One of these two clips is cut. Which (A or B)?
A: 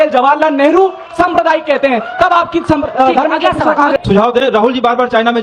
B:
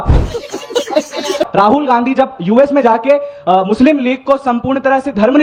A